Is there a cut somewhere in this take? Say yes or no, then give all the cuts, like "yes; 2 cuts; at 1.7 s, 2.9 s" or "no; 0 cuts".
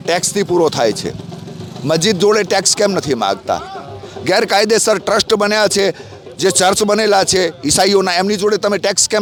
no; 0 cuts